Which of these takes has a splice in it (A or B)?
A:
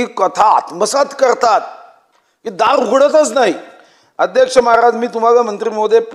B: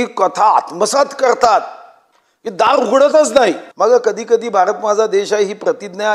B